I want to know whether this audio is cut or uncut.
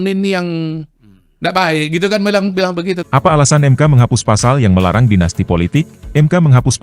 cut